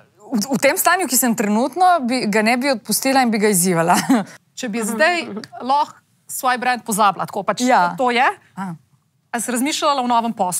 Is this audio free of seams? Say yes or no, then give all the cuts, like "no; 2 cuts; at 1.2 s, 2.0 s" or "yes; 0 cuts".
no; 1 cut; at 4.3 s